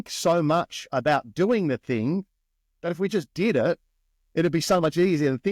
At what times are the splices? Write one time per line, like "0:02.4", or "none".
none